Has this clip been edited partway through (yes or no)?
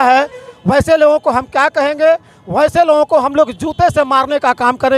no